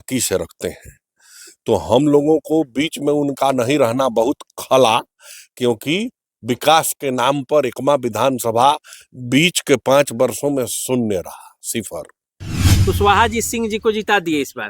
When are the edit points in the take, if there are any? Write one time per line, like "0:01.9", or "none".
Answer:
0:12.7